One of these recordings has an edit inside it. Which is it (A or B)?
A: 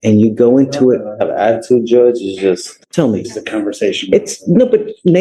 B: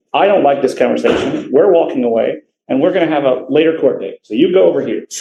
A